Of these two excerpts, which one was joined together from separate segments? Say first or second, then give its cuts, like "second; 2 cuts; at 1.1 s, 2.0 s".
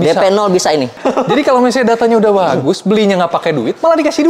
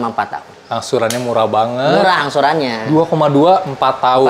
first; 1 cut; at 0.9 s